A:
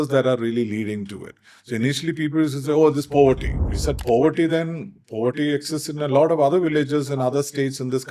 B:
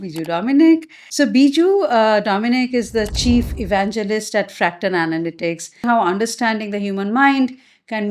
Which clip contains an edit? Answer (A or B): B